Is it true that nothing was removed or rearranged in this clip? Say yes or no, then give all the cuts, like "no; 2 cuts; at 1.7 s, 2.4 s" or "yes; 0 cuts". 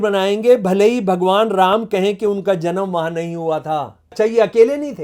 no; 1 cut; at 4.1 s